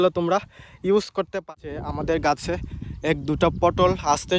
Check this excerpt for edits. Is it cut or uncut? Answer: cut